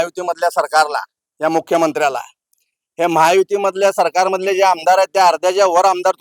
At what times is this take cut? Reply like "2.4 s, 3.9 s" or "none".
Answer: none